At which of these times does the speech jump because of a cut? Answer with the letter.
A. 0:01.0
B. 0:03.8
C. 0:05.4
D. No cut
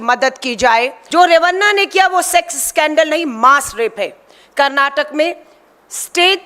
A